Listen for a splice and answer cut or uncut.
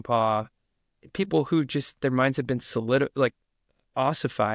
uncut